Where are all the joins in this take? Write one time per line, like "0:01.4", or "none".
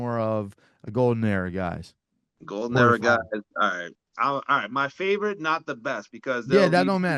0:04.1